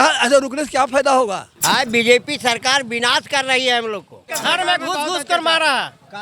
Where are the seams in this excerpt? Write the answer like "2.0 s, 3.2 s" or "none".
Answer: 1.5 s, 4.3 s

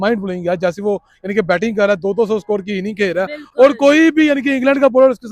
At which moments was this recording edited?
none

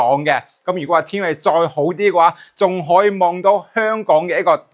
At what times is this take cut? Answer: none

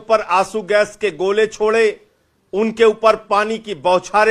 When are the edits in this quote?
none

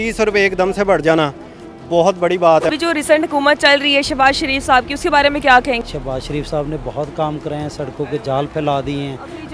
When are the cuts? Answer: 2.7 s, 5.8 s

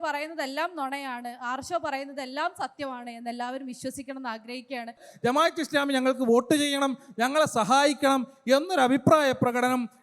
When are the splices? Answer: 5.1 s

